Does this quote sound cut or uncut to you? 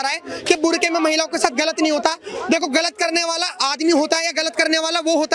uncut